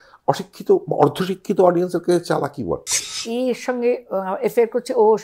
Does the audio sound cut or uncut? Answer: cut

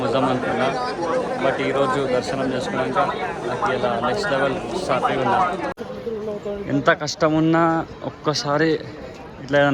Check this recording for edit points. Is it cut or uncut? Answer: cut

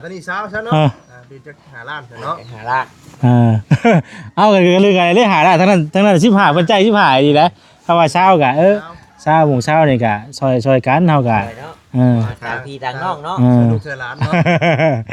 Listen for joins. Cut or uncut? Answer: uncut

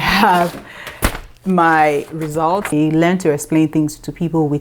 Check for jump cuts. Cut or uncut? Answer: cut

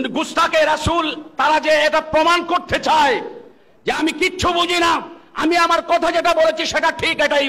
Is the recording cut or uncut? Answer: uncut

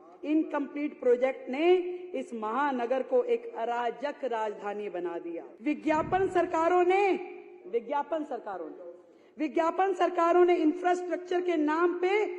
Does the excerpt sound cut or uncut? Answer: cut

